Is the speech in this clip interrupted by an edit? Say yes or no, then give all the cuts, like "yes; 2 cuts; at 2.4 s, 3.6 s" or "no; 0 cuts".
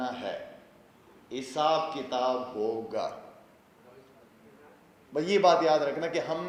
no; 0 cuts